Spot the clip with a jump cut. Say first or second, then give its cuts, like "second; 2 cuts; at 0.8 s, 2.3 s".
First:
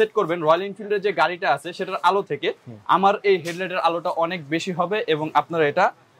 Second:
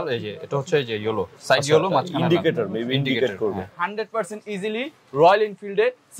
second; 1 cut; at 3.8 s